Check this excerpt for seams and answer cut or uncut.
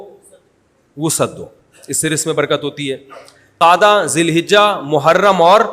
cut